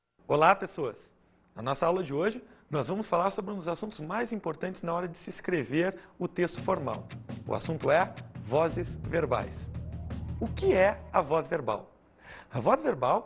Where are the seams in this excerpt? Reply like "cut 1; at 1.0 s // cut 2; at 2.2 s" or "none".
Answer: none